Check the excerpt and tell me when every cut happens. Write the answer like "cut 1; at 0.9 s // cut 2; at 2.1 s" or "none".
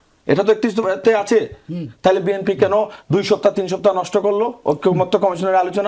none

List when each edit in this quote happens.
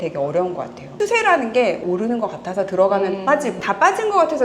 cut 1; at 0.9 s // cut 2; at 1.8 s // cut 3; at 3.6 s

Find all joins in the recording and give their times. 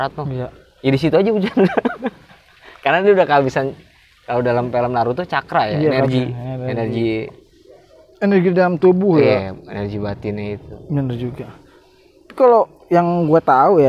none

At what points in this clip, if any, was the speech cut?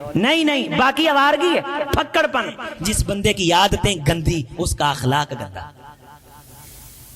cut 1; at 2.7 s

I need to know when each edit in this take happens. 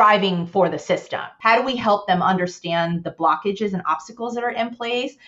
cut 1; at 1.3 s

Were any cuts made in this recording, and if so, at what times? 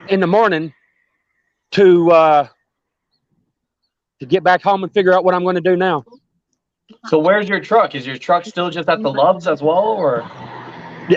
none

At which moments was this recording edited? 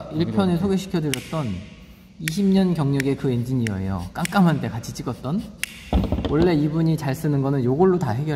none

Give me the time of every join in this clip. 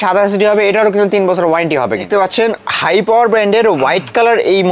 cut 1; at 2.1 s

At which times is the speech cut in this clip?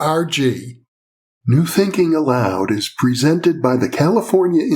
cut 1; at 1.4 s

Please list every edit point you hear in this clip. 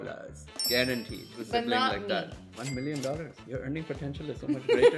cut 1; at 1.3 s // cut 2; at 3.4 s

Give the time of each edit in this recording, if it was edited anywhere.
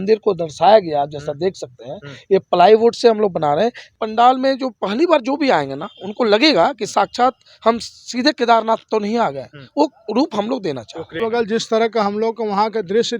cut 1; at 3.9 s // cut 2; at 11.2 s

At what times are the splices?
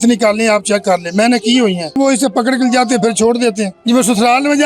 cut 1; at 2.0 s // cut 2; at 3.8 s

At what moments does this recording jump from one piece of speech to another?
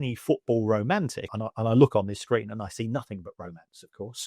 cut 1; at 1.3 s

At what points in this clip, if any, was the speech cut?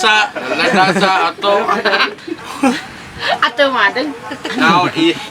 cut 1; at 2.3 s

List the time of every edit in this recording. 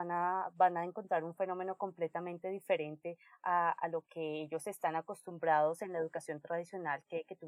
none

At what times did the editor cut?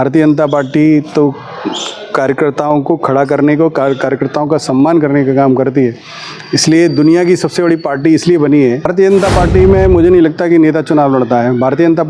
cut 1; at 8.9 s

